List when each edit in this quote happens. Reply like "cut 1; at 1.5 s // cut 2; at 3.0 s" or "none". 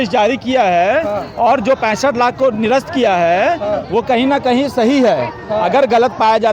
none